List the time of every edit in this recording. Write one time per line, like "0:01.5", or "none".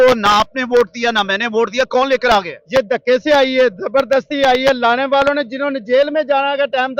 none